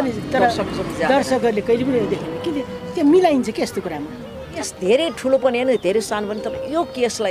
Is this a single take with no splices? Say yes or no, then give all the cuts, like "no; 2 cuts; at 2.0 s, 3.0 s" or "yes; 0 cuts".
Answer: no; 1 cut; at 4.7 s